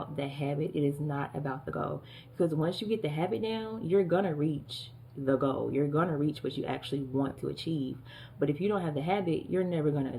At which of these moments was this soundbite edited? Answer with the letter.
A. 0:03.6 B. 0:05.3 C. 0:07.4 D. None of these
D